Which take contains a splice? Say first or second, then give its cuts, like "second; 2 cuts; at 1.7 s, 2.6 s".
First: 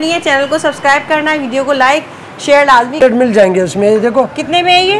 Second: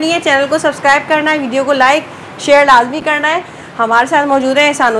first; 1 cut; at 3.0 s